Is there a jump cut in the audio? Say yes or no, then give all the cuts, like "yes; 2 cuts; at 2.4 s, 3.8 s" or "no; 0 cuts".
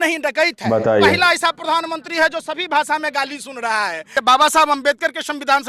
yes; 2 cuts; at 0.9 s, 4.1 s